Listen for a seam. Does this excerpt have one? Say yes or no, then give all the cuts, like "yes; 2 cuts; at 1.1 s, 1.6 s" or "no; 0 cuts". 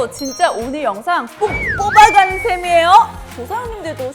yes; 1 cut; at 3.2 s